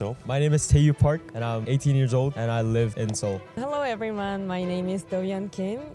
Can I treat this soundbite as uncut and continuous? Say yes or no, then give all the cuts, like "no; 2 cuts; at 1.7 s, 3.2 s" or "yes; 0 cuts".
no; 3 cuts; at 1.6 s, 2.4 s, 3.3 s